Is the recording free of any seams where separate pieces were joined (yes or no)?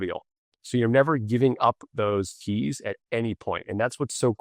yes